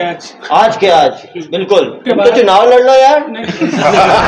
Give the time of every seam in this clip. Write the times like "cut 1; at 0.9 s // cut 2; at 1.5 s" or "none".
cut 1; at 1.9 s